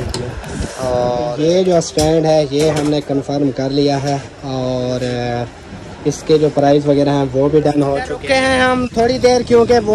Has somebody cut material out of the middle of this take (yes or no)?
yes